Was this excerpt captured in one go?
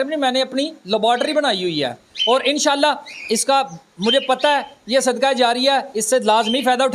yes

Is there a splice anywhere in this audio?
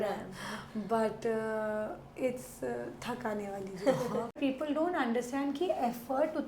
yes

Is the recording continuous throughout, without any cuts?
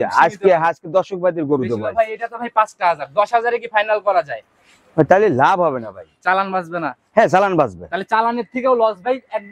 yes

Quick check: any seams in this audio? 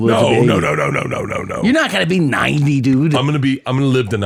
no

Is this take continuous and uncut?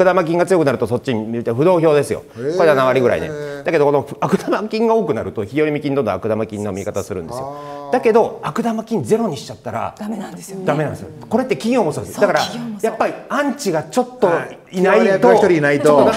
yes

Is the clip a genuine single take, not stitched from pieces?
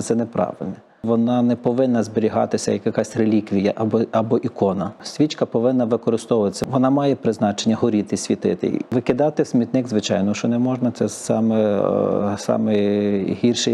no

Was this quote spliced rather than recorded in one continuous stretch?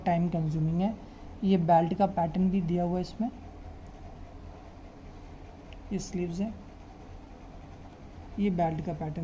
no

